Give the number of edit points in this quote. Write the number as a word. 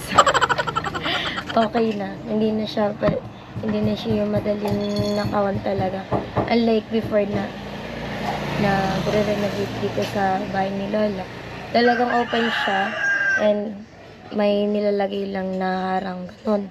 zero